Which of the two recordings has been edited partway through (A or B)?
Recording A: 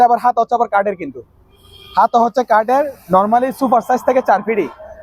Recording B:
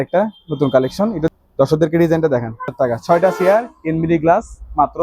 B